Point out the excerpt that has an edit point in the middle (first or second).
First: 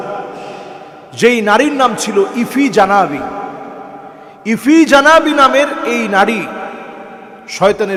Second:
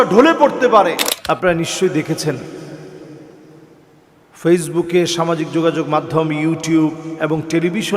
second